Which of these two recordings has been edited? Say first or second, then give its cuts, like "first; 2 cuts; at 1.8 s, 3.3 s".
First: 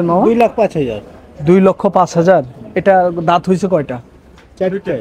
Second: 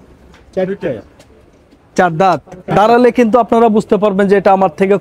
second; 1 cut; at 2.5 s